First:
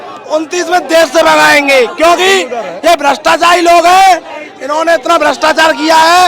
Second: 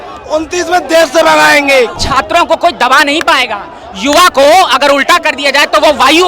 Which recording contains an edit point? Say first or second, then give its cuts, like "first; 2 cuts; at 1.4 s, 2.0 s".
second; 1 cut; at 1.9 s